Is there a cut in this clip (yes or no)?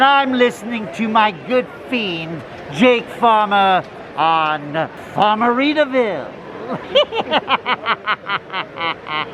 yes